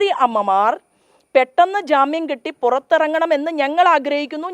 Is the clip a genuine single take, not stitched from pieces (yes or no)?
yes